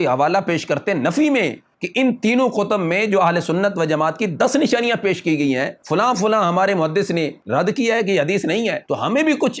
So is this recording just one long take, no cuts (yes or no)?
no